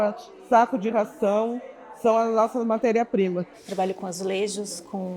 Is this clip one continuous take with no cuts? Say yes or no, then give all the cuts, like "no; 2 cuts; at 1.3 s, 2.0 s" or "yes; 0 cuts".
no; 1 cut; at 3.5 s